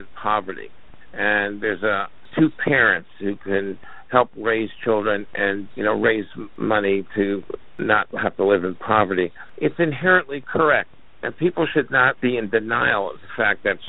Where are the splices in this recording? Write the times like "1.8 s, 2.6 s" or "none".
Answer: 2.2 s, 5.7 s, 6.5 s, 7.8 s, 9.4 s, 12.2 s